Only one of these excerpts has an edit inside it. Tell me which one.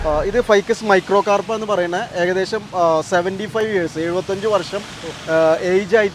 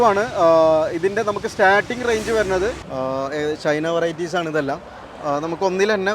second; 1 cut; at 2.9 s

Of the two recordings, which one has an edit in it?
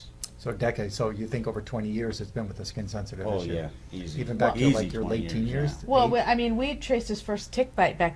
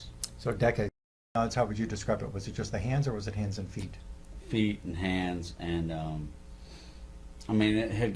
second; 1 cut; at 1.3 s

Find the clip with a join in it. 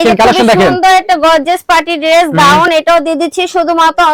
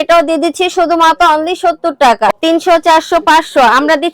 second; 1 cut; at 2.3 s

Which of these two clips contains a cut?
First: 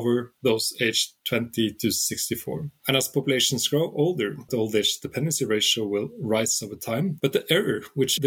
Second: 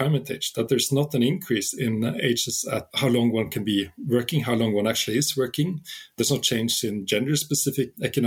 first; 2 cuts; at 4.4 s, 7.1 s

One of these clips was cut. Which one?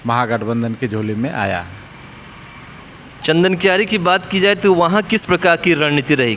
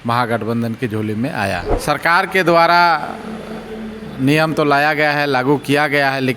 second; 1 cut; at 1.7 s

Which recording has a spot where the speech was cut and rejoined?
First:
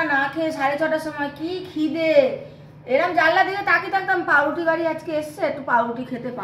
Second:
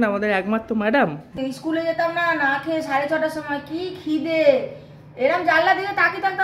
second; 1 cut; at 1.3 s

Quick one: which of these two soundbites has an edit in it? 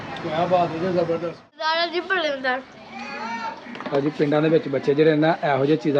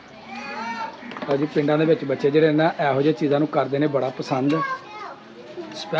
first; 1 cut; at 1.7 s

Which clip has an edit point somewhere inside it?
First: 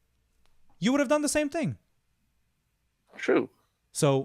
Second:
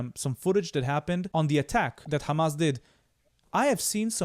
second; 2 cuts; at 1.3 s, 2.1 s

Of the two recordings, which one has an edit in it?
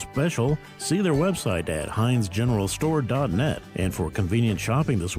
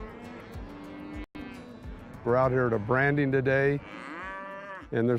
second; 1 cut; at 1.3 s

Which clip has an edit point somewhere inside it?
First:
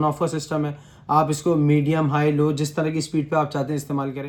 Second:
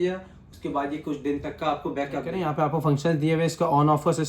second; 1 cut; at 2.3 s

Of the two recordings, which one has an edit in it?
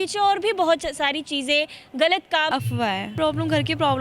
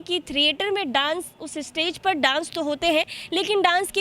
first; 1 cut; at 2.5 s

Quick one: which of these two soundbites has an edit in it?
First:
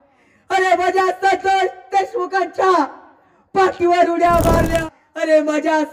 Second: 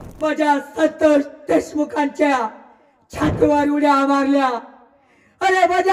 first; 1 cut; at 4.8 s

